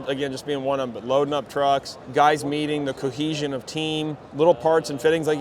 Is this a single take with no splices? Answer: no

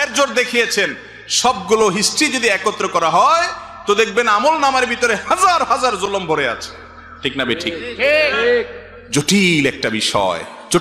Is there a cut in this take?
no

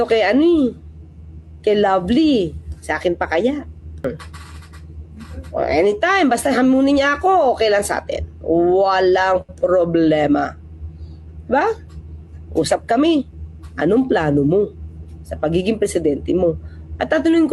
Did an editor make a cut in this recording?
yes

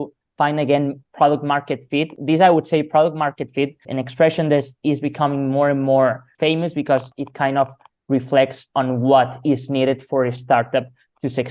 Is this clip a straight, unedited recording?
no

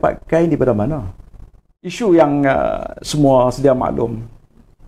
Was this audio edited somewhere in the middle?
yes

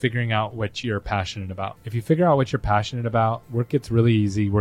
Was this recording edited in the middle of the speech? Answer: yes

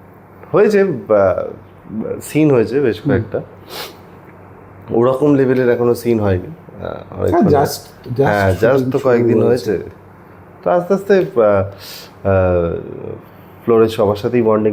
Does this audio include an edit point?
no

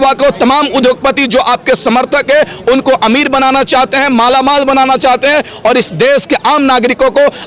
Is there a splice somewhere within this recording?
no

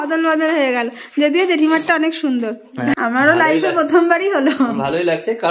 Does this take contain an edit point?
yes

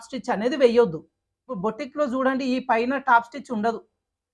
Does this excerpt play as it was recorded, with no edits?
no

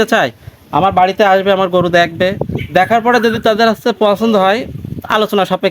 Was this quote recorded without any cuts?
yes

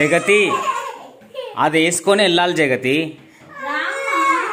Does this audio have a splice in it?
no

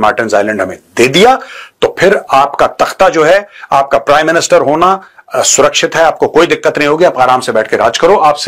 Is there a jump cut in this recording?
no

